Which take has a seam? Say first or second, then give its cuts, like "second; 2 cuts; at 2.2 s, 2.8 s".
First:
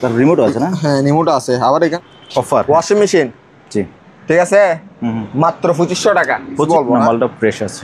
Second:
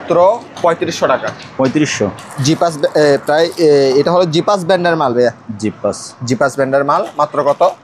first; 2 cuts; at 1.9 s, 6.7 s